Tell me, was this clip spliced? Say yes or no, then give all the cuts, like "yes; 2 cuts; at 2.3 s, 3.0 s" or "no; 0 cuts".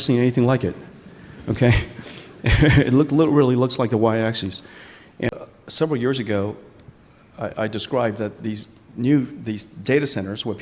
yes; 1 cut; at 5.3 s